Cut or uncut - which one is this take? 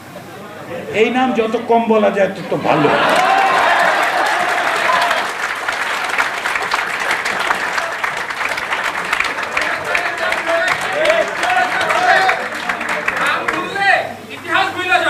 uncut